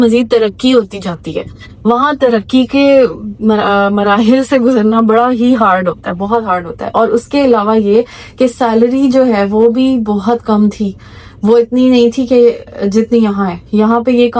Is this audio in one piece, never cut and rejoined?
yes; 0 cuts

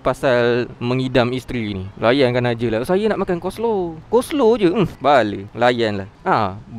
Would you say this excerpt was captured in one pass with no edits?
yes; 0 cuts

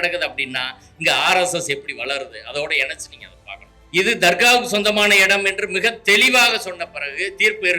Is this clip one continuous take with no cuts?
no; 1 cut; at 3.8 s

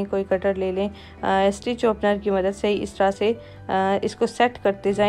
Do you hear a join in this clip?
no; 0 cuts

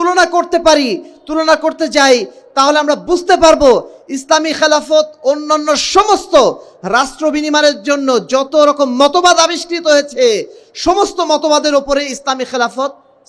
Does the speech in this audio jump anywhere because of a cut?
no; 0 cuts

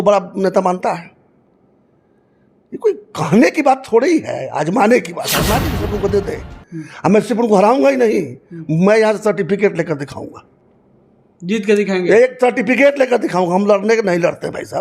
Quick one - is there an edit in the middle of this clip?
yes; 1 cut; at 5.7 s

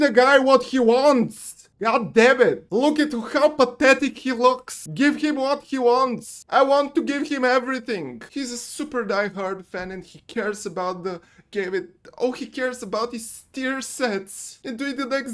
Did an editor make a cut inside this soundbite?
no; 0 cuts

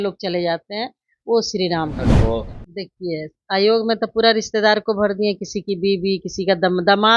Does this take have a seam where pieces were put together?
yes; 1 cut; at 2.2 s

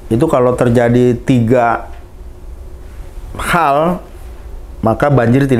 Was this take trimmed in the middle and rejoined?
no; 0 cuts

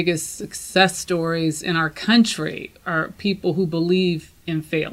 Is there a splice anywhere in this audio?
no; 0 cuts

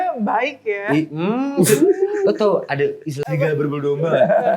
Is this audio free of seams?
no; 1 cut; at 3.1 s

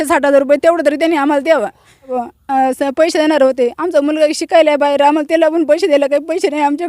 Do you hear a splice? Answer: yes; 1 cut; at 2.2 s

